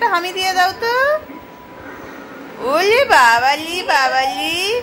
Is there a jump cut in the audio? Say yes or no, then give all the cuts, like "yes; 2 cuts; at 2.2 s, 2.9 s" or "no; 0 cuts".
no; 0 cuts